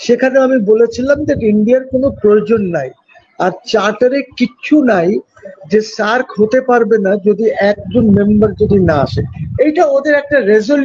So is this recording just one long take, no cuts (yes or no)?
yes